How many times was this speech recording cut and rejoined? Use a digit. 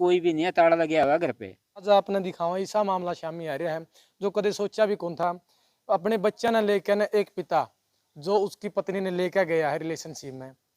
1